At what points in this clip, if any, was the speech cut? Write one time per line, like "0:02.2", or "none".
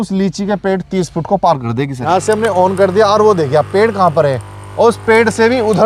0:01.9